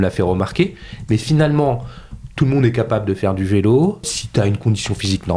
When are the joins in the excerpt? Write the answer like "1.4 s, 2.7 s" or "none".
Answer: 4.1 s